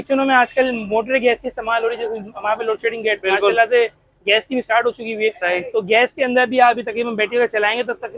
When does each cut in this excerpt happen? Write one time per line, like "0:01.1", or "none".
none